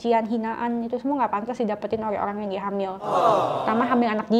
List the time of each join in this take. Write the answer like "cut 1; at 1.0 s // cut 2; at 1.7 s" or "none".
none